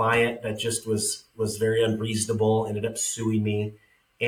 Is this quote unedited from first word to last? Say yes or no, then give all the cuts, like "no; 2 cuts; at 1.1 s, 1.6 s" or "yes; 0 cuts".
yes; 0 cuts